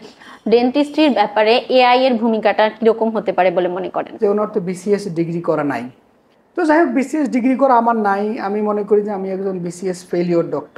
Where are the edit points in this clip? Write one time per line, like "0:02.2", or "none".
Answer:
0:04.1